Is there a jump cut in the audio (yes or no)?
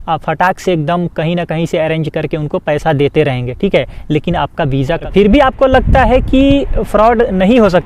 yes